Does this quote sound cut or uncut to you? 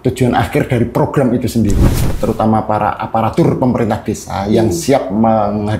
cut